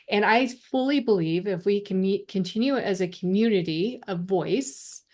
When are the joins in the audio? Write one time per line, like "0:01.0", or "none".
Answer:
none